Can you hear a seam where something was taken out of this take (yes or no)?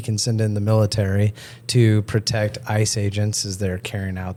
no